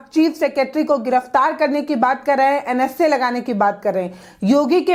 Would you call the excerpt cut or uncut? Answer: uncut